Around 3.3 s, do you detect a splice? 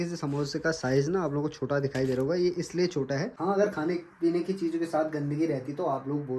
yes; 1 cut; at 3.3 s

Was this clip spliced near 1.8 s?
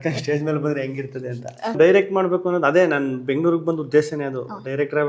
yes; 1 cut; at 1.8 s

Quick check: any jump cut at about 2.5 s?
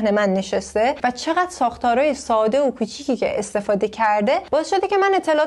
no; 0 cuts

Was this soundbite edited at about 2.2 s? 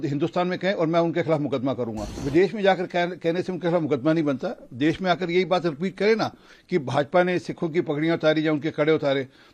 yes; 1 cut; at 2.2 s

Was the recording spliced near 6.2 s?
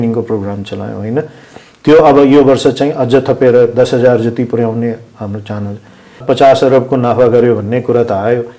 yes; 1 cut; at 6.2 s

